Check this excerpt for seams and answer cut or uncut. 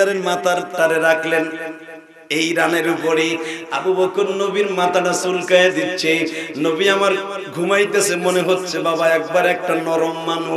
uncut